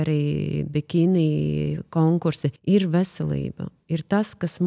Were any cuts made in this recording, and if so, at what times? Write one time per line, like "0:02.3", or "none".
0:02.5